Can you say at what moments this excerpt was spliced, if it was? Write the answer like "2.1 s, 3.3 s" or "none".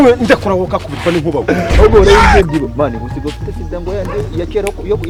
none